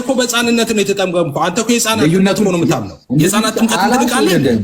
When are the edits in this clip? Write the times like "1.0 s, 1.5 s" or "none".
2.9 s